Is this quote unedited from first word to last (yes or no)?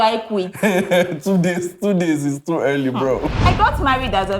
no